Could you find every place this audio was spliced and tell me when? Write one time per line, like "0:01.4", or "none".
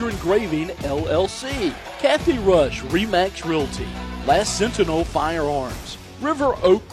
0:01.9